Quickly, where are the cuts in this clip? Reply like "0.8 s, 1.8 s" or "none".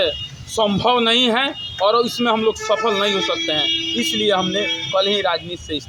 none